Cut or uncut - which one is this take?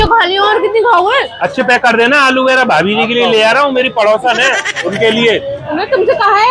cut